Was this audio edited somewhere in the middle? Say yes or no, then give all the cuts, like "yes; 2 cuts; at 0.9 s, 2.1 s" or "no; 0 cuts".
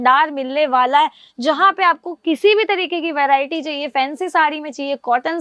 no; 0 cuts